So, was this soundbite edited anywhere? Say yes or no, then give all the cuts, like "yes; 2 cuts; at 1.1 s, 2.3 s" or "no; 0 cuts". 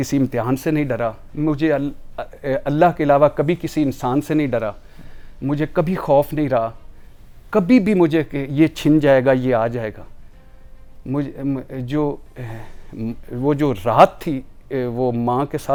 no; 0 cuts